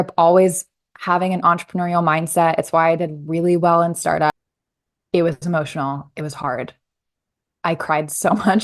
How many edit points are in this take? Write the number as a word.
one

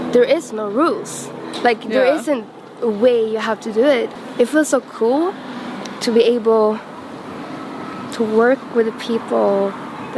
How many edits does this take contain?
one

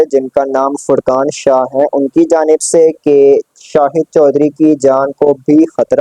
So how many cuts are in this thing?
zero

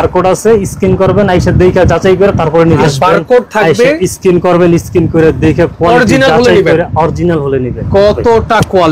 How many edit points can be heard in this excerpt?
two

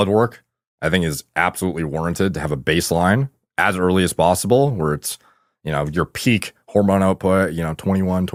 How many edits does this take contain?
zero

